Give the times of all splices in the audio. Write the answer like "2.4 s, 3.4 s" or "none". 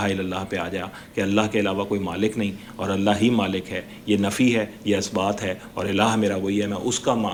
none